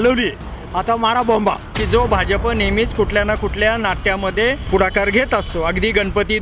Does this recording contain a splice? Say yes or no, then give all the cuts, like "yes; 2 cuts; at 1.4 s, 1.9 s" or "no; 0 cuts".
yes; 2 cuts; at 1.7 s, 4.6 s